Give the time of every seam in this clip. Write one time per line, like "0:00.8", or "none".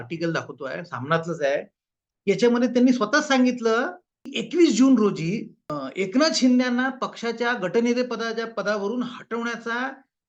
0:04.4